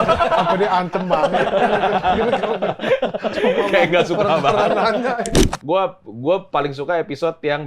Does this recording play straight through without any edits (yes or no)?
no